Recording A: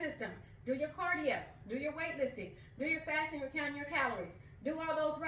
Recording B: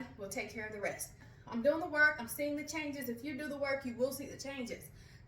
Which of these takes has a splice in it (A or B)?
B